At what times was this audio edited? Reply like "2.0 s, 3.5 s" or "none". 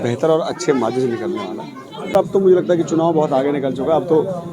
2.1 s